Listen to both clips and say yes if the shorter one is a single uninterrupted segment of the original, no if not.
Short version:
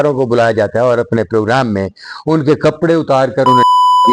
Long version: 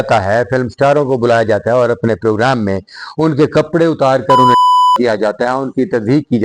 yes